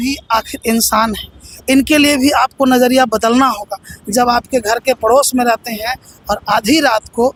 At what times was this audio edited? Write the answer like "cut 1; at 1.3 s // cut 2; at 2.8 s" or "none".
none